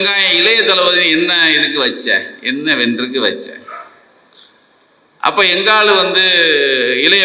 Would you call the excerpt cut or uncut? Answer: uncut